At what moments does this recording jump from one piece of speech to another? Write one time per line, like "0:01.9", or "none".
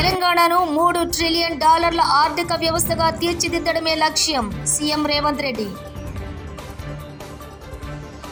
none